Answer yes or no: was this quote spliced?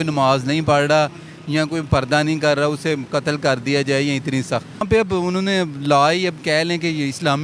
yes